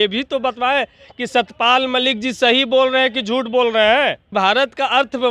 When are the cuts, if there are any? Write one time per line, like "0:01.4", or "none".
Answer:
0:04.2